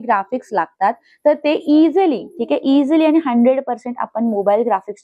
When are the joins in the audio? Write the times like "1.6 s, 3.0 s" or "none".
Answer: none